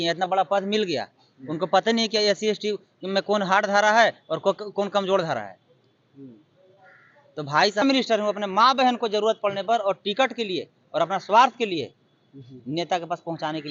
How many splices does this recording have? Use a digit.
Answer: 1